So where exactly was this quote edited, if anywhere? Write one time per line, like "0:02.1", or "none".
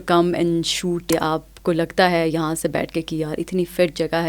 0:01.1